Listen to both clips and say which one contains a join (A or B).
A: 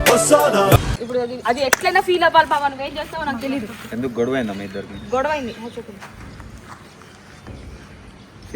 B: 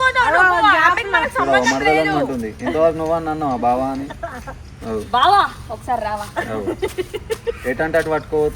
A